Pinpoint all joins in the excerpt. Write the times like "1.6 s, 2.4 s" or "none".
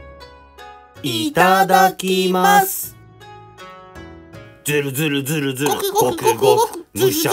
none